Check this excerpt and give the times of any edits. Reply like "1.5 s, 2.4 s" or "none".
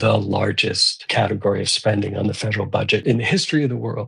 1.1 s, 3.0 s